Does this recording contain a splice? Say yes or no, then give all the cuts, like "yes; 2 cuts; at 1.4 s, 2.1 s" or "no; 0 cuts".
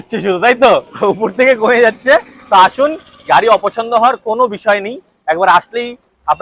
no; 0 cuts